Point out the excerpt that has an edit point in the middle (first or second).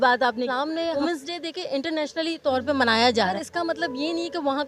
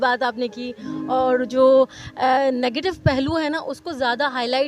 first